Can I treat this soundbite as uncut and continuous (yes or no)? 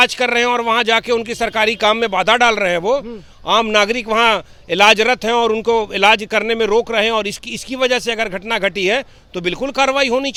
yes